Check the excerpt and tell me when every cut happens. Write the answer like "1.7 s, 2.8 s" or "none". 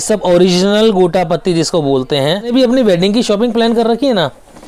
2.5 s